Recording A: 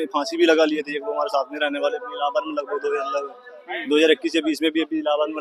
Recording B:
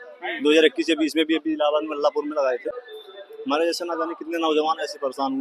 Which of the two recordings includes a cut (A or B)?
B